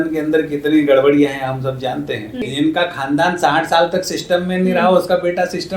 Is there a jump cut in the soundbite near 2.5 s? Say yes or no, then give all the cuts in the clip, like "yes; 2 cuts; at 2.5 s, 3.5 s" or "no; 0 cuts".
yes; 1 cut; at 2.5 s